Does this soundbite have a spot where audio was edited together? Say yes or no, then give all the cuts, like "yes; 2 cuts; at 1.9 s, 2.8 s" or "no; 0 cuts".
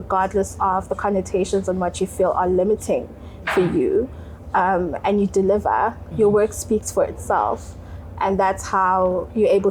no; 0 cuts